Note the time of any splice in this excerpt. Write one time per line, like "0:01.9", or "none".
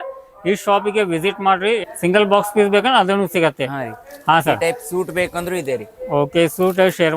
0:01.9